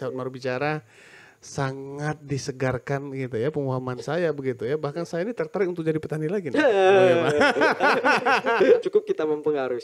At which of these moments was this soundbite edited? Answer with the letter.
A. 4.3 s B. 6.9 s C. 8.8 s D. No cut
C